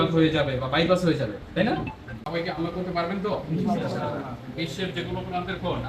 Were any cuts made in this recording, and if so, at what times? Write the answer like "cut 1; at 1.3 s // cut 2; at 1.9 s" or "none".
cut 1; at 2.2 s